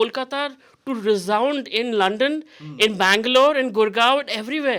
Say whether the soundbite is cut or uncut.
uncut